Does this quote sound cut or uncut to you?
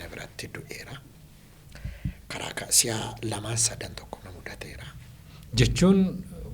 uncut